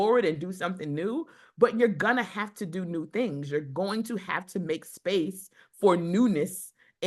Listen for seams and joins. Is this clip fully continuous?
yes; 0 cuts

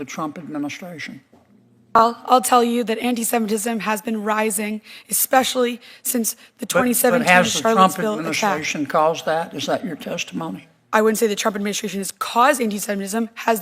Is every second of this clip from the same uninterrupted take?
no; 1 cut; at 2.0 s

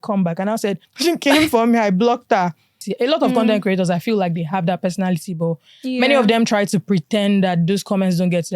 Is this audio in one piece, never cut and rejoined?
no; 2 cuts; at 0.9 s, 2.8 s

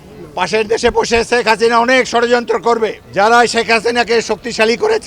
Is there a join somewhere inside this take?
yes; 1 cut; at 3.0 s

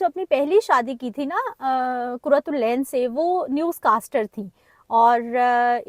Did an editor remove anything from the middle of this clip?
no; 0 cuts

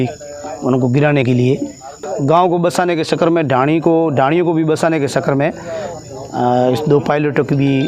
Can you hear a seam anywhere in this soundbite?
yes; 1 cut; at 2.0 s

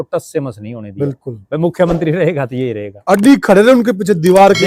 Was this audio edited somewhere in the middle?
no; 0 cuts

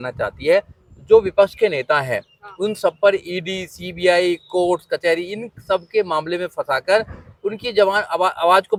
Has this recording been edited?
no; 0 cuts

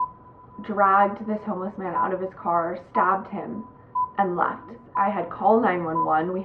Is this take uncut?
no; 1 cut; at 4.9 s

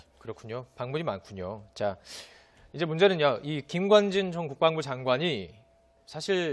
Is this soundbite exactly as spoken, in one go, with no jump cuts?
no; 1 cut; at 2.3 s

